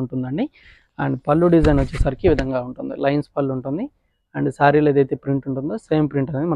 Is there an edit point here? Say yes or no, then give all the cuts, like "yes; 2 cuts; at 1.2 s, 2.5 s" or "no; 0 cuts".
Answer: no; 0 cuts